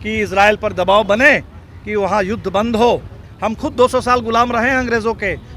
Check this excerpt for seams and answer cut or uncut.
cut